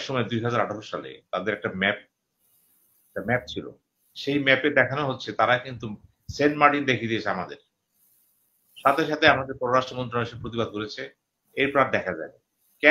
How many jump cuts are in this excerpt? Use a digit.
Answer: 0